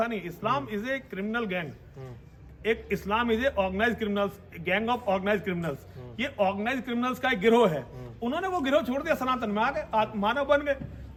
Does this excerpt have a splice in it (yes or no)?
no